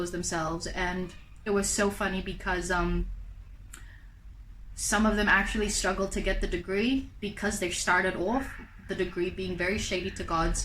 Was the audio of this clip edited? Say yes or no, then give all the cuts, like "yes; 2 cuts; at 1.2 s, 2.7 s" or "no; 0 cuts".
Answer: no; 0 cuts